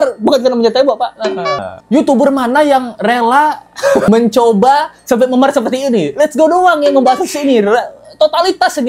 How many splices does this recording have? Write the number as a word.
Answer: two